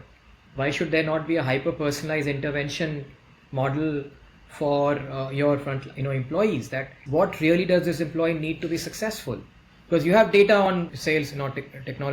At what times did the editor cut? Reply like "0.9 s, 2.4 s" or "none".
7.0 s, 10.9 s

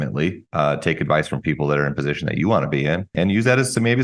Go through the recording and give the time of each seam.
3.1 s

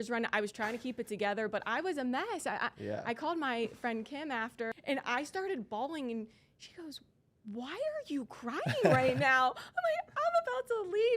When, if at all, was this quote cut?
4.7 s

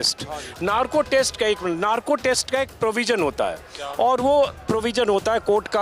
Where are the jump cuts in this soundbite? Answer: none

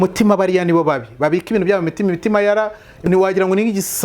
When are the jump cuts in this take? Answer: 3.0 s

